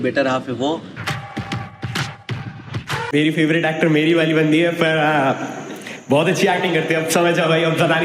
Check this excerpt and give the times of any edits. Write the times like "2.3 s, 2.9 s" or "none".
3.1 s